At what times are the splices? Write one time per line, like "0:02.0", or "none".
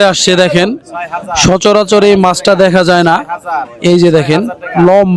none